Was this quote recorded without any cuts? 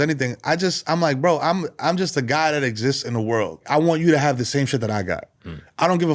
no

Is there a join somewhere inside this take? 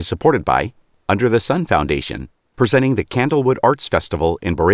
no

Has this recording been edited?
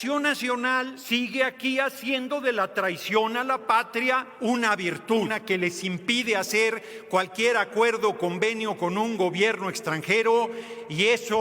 yes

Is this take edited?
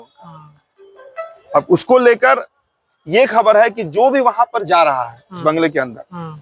no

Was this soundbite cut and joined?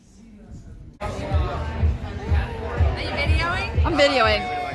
yes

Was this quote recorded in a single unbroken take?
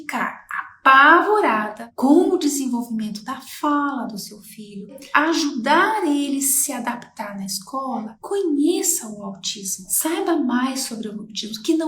no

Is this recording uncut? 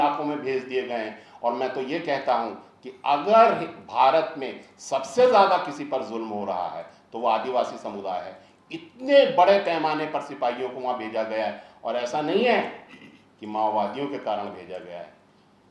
yes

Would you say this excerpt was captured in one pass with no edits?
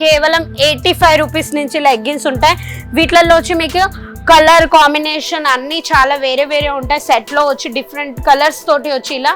yes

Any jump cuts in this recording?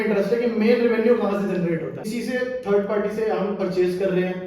yes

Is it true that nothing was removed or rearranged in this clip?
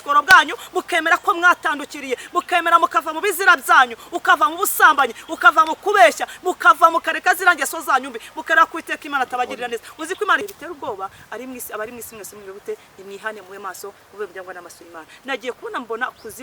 no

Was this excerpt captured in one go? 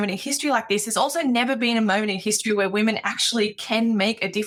yes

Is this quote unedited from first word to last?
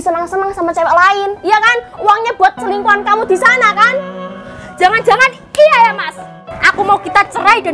no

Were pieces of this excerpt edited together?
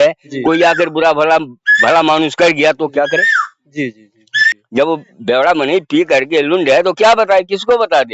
yes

